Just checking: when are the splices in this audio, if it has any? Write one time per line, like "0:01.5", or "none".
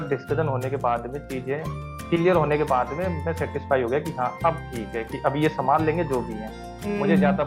none